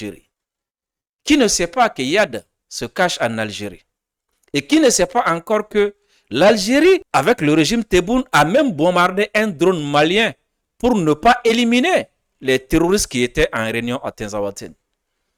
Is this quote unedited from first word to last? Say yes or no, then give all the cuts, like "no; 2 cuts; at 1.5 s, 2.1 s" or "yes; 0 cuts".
yes; 0 cuts